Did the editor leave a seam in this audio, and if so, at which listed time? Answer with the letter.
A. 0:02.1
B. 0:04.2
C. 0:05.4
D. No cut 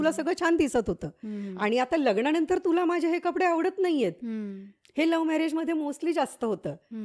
D